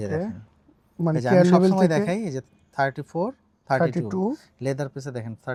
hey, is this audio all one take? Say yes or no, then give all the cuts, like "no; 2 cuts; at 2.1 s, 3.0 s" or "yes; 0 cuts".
yes; 0 cuts